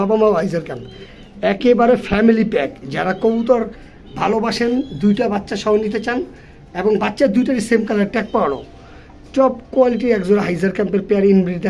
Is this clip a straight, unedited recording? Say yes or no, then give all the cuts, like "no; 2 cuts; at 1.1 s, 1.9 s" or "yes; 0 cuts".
yes; 0 cuts